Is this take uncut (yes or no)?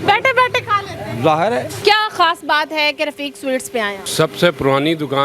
no